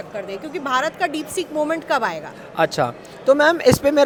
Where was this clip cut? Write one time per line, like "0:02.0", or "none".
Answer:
none